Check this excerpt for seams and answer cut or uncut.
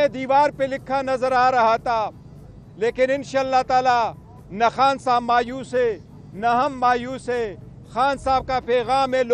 uncut